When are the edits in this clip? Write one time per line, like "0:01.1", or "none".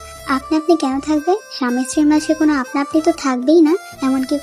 none